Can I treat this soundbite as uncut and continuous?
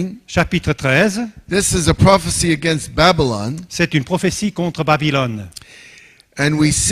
yes; 0 cuts

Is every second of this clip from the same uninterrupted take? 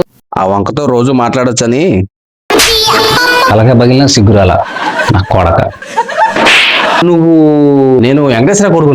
no; 1 cut; at 7.0 s

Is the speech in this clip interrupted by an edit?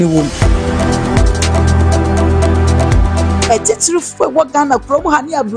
no; 0 cuts

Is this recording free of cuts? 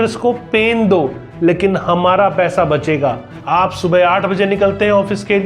no; 1 cut; at 3.3 s

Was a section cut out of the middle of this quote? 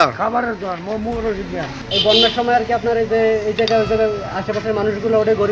yes; 1 cut; at 1.8 s

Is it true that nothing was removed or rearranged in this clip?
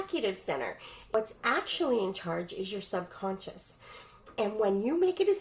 no; 1 cut; at 0.9 s

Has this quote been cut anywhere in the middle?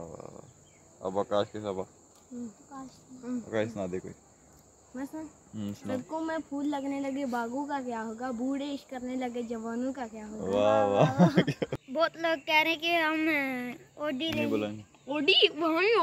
yes; 1 cut; at 11.7 s

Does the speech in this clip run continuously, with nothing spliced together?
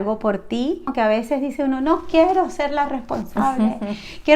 no; 1 cut; at 0.9 s

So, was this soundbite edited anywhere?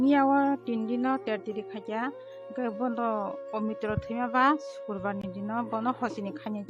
no; 0 cuts

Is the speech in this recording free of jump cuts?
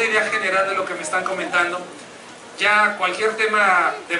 yes; 0 cuts

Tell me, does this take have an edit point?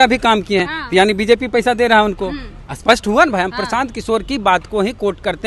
no; 0 cuts

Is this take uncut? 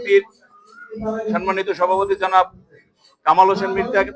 yes; 0 cuts

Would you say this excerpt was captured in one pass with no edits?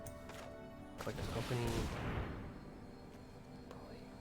no; 1 cut; at 1.0 s

